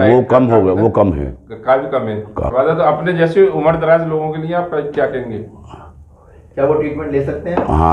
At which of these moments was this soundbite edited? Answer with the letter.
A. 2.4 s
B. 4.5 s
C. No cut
A